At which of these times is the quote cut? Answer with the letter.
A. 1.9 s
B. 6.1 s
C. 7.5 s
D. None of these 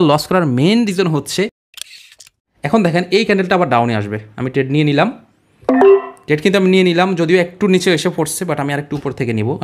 A